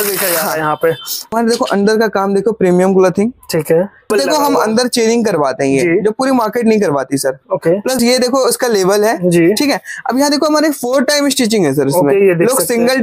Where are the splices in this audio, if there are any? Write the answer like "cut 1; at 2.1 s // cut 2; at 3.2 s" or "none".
cut 1; at 1.2 s // cut 2; at 4.1 s // cut 3; at 8.0 s